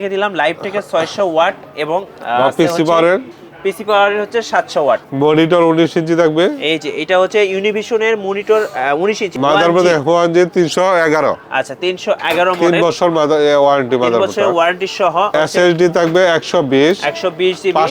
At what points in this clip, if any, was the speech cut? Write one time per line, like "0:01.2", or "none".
0:05.1
0:09.3
0:15.3